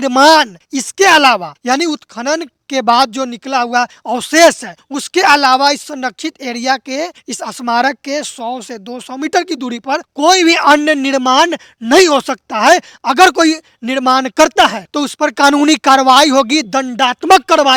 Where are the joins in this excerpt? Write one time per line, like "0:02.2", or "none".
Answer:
none